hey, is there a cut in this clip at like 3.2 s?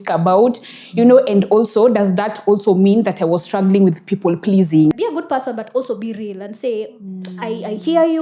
no; 1 cut; at 4.9 s

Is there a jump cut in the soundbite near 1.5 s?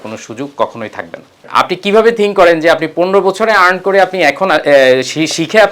yes; 1 cut; at 1.5 s

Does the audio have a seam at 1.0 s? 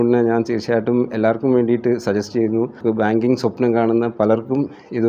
no; 1 cut; at 2.8 s

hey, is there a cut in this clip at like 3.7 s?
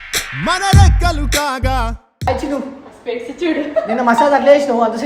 no; 1 cut; at 2.3 s

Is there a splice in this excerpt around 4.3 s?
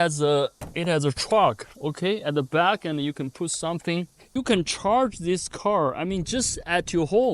yes; 1 cut; at 4.3 s

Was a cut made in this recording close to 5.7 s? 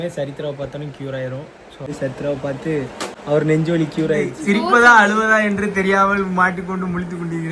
no; 2 cuts; at 1.9 s, 4.3 s

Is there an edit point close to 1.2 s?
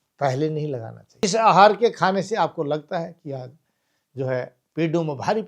yes; 1 cut; at 1.2 s

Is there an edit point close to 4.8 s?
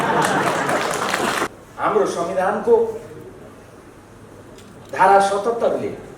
no; 1 cut; at 1.5 s

